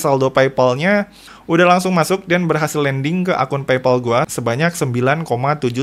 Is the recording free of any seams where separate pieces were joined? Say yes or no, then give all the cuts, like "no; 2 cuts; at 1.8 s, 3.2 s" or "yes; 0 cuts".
yes; 0 cuts